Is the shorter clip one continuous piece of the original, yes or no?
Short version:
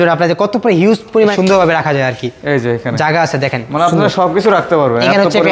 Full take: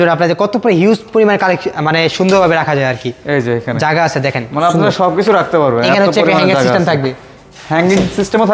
no